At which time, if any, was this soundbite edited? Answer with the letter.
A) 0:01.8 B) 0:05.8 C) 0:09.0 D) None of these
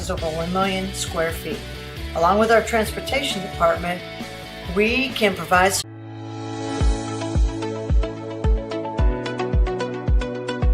B